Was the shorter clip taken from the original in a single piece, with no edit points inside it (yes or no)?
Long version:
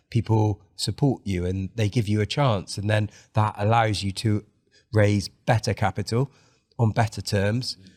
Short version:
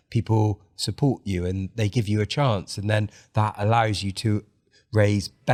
yes